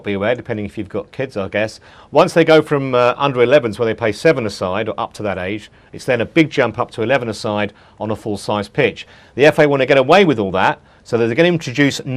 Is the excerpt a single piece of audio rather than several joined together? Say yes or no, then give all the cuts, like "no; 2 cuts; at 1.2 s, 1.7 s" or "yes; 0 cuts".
no; 1 cut; at 10.2 s